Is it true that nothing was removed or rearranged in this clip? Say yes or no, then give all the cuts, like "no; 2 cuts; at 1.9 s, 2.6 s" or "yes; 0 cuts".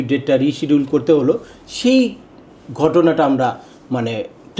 yes; 0 cuts